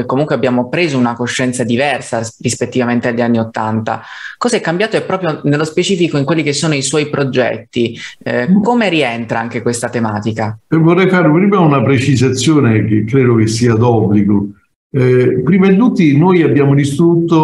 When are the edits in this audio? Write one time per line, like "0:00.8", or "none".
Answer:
none